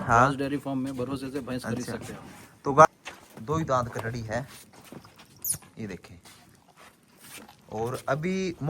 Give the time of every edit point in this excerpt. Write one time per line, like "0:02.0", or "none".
0:02.9